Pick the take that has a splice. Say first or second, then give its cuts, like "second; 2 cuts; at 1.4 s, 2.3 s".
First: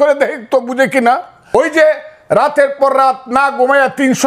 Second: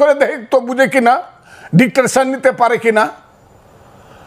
first; 1 cut; at 1.5 s